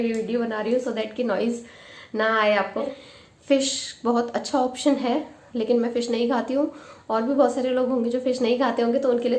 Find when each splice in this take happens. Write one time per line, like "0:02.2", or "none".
0:02.9